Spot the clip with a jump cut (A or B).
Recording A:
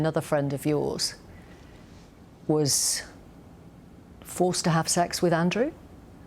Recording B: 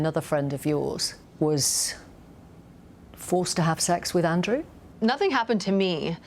B